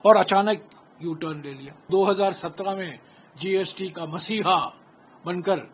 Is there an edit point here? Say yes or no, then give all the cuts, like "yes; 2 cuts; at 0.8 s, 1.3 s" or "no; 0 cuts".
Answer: yes; 1 cut; at 1.9 s